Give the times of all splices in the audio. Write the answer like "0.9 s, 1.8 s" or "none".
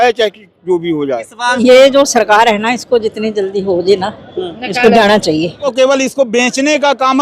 1.5 s, 5.7 s